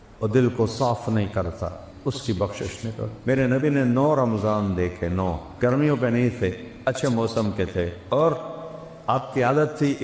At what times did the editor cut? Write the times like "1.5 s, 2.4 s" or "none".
3.1 s, 5.4 s, 8.0 s